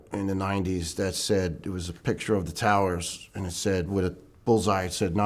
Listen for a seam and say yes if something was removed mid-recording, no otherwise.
no